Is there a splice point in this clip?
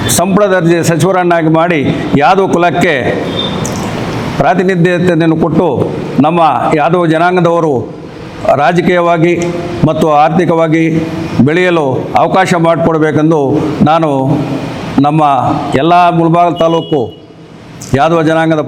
no; 0 cuts

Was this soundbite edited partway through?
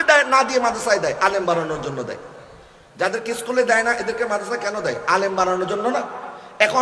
no; 0 cuts

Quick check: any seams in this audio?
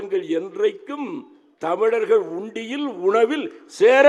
no; 0 cuts

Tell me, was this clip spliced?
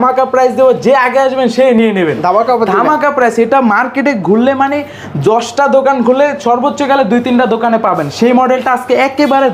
no; 0 cuts

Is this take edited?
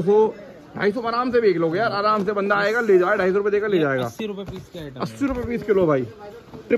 no; 0 cuts

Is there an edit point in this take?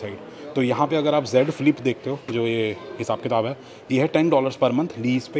no; 0 cuts

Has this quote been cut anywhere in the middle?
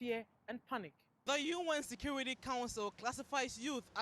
yes; 1 cut; at 1.1 s

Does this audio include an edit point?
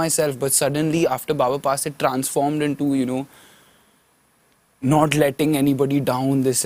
no; 0 cuts

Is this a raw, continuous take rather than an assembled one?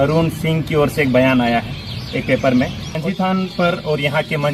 no; 1 cut; at 2.9 s

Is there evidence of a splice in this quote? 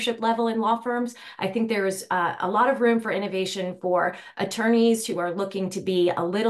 no; 0 cuts

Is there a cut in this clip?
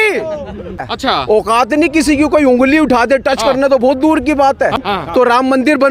yes; 2 cuts; at 0.9 s, 4.8 s

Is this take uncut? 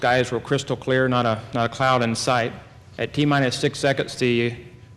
no; 1 cut; at 2.4 s

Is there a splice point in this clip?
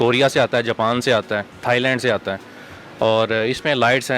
no; 0 cuts

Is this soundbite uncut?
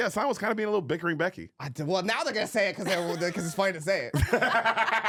yes; 0 cuts

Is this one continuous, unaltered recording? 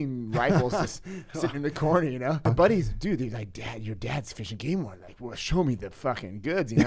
no; 1 cut; at 2.5 s

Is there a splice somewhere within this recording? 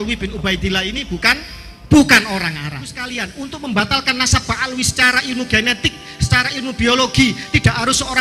yes; 1 cut; at 3.2 s

